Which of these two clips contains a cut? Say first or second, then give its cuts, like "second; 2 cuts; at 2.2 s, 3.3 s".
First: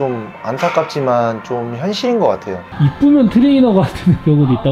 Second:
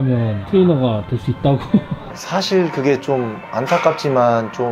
first; 1 cut; at 2.6 s